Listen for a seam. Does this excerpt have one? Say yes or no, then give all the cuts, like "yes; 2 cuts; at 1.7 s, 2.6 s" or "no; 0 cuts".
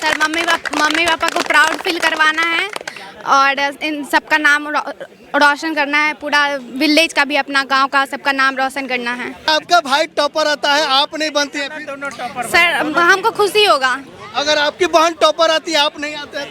yes; 1 cut; at 9.5 s